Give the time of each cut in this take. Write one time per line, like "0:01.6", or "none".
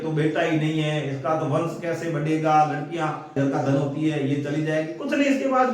0:03.3